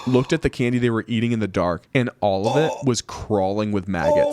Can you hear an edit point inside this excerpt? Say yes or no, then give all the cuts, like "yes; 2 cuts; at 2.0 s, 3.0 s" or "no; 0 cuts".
yes; 1 cut; at 1.8 s